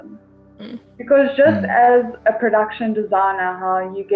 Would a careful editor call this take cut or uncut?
uncut